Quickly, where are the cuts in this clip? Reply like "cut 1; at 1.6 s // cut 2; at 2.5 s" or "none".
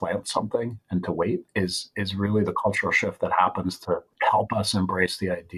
cut 1; at 1.5 s // cut 2; at 4.1 s